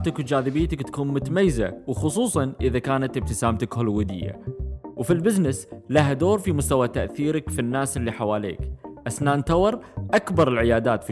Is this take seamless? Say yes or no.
yes